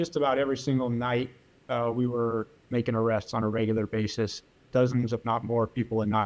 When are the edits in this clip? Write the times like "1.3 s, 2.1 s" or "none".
none